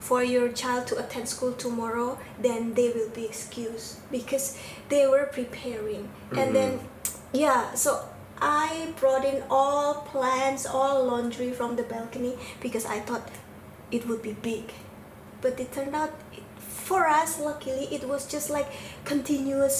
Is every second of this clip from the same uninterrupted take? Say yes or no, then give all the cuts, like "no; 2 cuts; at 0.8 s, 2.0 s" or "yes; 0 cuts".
yes; 0 cuts